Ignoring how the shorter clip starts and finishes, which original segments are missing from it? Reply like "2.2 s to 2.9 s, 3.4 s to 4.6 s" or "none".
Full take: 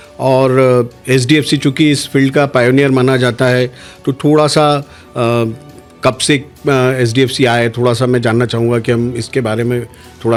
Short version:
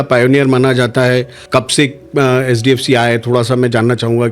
3.8 s to 5.9 s